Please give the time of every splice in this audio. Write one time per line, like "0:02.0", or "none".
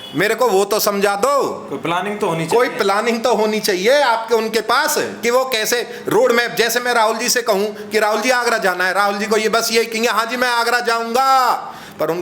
none